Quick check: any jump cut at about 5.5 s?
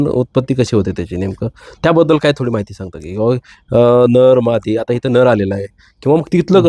no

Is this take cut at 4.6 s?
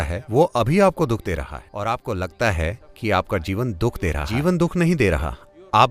no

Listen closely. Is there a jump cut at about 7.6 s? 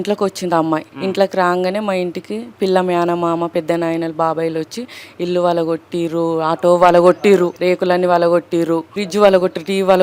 yes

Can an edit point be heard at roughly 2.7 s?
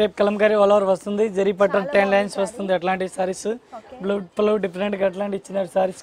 no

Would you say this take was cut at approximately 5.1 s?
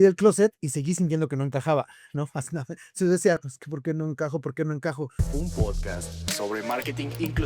yes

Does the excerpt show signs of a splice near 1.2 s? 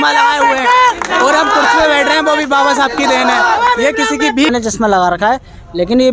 no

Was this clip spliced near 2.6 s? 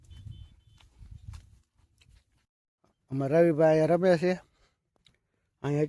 yes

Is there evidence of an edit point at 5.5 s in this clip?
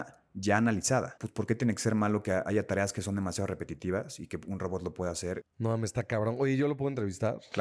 yes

